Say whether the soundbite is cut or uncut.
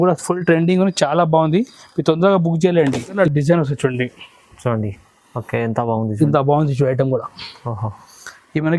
cut